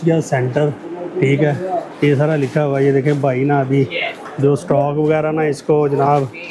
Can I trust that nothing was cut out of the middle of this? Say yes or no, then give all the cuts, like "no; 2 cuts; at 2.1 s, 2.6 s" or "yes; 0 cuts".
yes; 0 cuts